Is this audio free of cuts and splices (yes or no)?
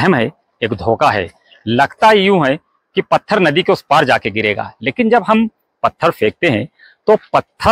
yes